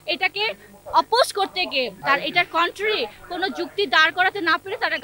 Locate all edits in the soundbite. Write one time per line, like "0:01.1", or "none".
0:02.0